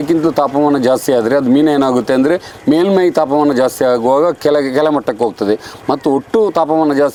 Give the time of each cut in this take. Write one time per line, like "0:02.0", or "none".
none